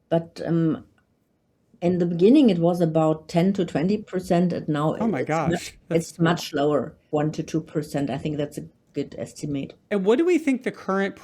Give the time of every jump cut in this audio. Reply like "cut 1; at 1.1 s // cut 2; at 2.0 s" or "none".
cut 1; at 7.0 s // cut 2; at 9.8 s

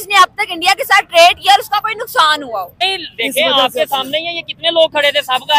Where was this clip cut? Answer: cut 1; at 2.8 s

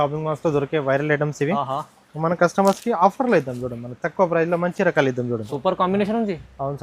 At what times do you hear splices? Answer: cut 1; at 5.5 s

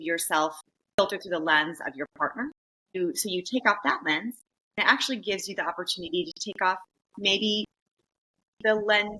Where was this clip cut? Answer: cut 1; at 1.0 s // cut 2; at 3.0 s // cut 3; at 4.8 s

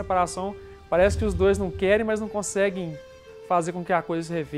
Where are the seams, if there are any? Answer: none

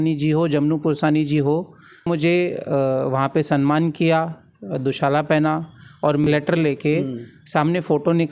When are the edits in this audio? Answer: cut 1; at 2.1 s // cut 2; at 6.3 s

